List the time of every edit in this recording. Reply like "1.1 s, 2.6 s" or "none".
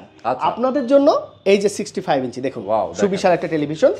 none